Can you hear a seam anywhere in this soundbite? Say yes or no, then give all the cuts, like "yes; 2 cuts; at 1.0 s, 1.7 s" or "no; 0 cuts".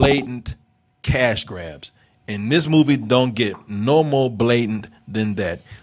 no; 0 cuts